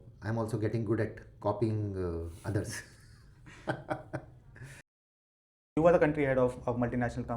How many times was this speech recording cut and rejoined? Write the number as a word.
one